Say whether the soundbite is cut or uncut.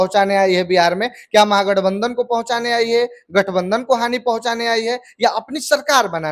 uncut